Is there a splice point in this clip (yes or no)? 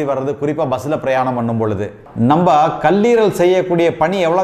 yes